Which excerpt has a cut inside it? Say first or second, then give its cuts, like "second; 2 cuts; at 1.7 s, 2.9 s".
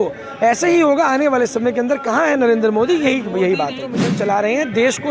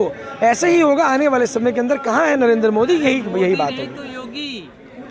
first; 1 cut; at 4.1 s